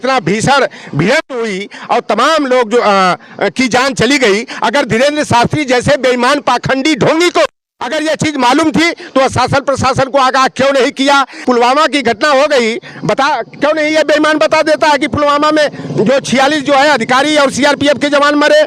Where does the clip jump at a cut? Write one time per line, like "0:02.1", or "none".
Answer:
0:11.3